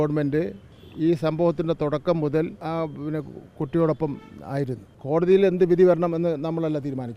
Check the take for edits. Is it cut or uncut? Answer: cut